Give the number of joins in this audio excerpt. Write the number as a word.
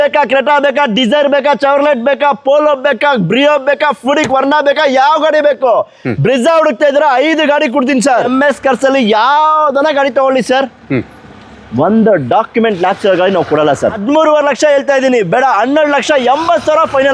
two